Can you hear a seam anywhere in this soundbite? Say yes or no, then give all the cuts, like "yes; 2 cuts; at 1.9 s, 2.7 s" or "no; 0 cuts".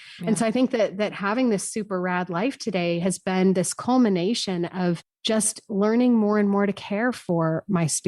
yes; 1 cut; at 3.8 s